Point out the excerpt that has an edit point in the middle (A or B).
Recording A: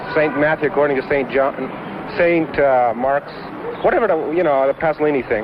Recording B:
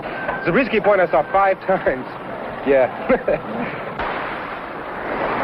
B